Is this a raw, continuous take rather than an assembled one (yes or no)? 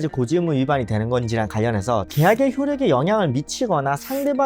no